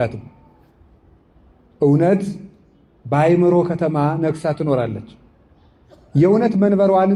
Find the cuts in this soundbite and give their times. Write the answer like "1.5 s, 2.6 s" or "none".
none